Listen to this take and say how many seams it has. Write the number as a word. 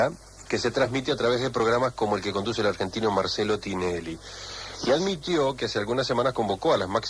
one